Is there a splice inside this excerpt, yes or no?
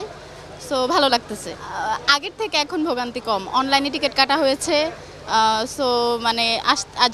no